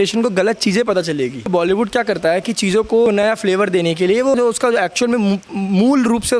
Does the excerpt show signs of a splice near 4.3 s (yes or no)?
yes